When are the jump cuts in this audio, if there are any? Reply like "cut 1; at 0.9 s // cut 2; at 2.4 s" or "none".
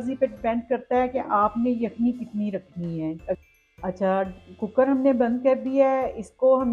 cut 1; at 3.4 s